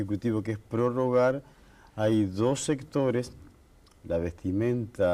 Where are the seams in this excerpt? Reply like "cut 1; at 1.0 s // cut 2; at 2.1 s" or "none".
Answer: cut 1; at 2.6 s